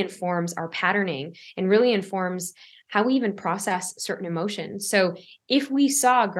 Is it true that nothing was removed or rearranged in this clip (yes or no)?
yes